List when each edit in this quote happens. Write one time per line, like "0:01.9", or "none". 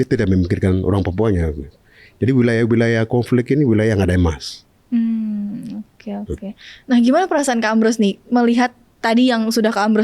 none

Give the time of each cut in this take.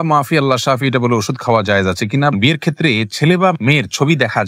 0:02.3

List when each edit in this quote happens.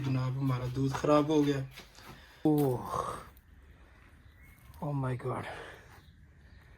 0:02.4

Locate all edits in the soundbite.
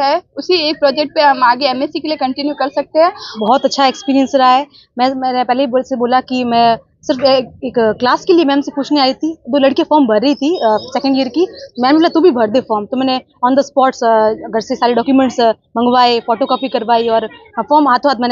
0:03.3

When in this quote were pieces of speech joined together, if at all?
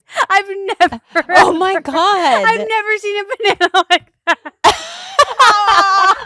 none

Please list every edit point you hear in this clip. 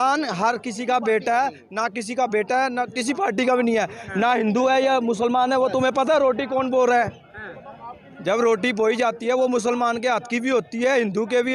none

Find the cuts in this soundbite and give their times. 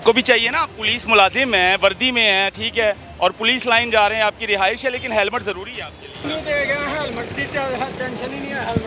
0:06.2

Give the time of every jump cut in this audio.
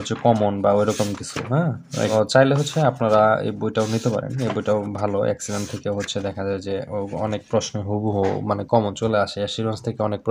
0:02.1

